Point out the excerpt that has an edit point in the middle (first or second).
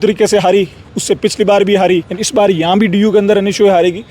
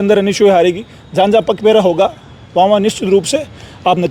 first